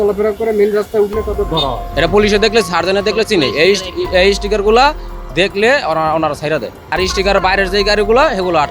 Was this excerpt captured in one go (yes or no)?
no